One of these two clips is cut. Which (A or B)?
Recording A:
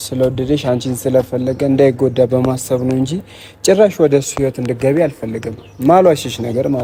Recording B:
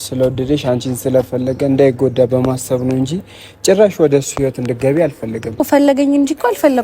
B